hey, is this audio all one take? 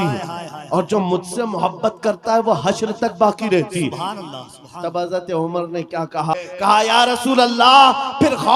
no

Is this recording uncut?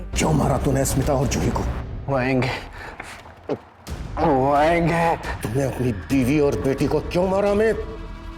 no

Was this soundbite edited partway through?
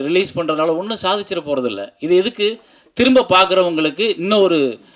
no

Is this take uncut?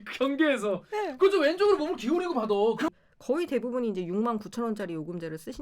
no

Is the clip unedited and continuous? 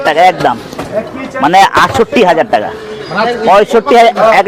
yes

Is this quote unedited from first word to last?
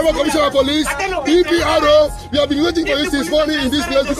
yes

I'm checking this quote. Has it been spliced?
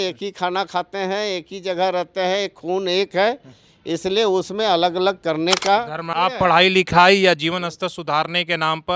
yes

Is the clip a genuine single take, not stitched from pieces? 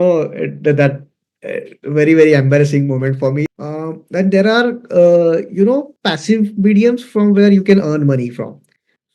no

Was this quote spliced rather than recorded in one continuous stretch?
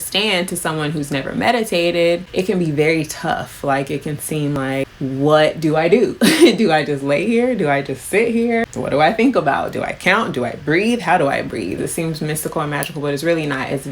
yes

